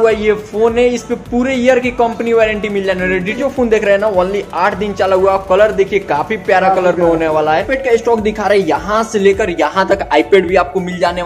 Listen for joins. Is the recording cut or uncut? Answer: cut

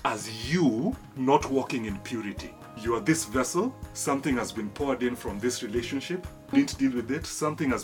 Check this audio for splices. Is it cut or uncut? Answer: cut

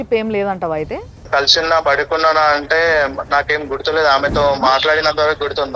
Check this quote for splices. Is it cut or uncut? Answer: cut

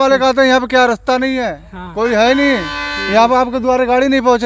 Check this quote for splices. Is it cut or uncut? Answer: uncut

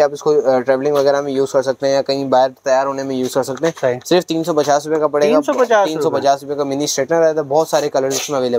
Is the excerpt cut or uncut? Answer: uncut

